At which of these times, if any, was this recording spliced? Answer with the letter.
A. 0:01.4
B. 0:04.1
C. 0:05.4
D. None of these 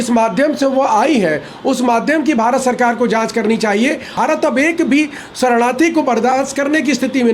B